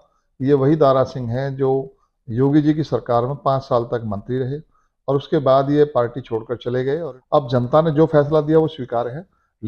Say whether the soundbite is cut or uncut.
cut